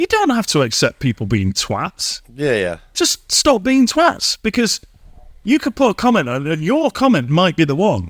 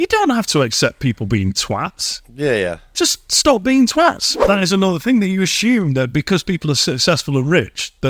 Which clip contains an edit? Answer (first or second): second